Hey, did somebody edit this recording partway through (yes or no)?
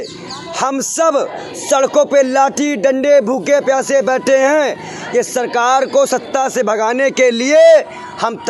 no